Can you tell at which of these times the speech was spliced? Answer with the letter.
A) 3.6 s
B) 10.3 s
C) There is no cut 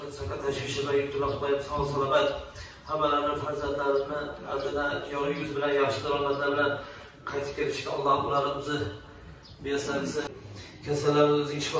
B